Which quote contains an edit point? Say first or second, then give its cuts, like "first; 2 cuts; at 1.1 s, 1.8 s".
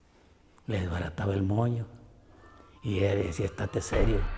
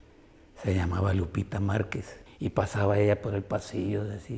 second; 1 cut; at 2.0 s